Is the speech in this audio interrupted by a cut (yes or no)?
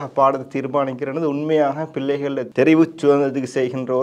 yes